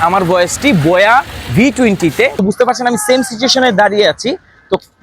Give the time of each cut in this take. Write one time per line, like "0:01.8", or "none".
0:02.4